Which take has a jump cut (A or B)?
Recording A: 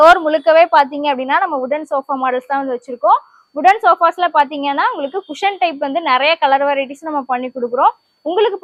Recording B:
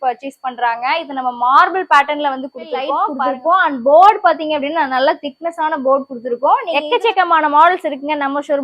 B